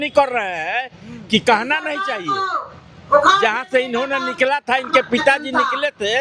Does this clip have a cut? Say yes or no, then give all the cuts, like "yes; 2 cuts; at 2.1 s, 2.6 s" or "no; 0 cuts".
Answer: no; 0 cuts